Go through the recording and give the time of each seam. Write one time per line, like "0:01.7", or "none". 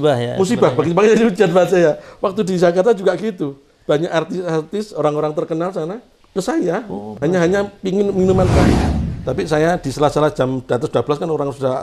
0:06.1
0:08.8

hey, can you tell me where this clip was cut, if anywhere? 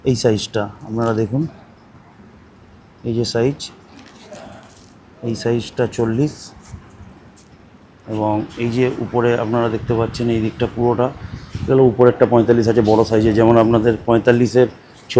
none

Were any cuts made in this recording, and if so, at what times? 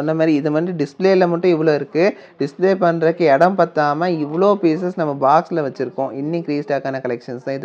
none

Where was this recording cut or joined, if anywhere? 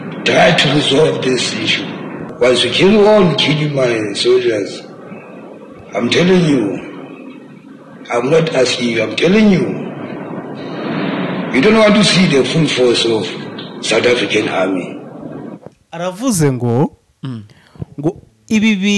0:02.2

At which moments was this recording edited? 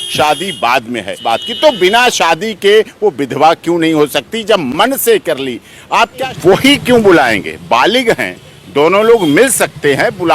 0:01.1
0:06.2

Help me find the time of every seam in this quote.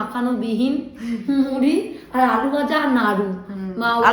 none

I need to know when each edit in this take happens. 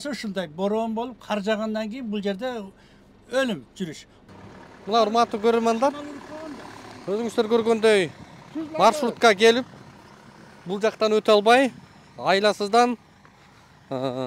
0:04.1

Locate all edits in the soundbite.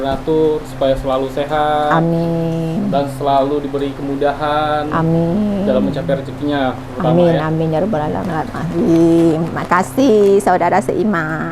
0:08.2

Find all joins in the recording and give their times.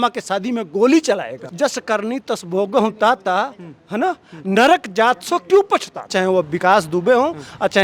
0:01.5
0:06.0

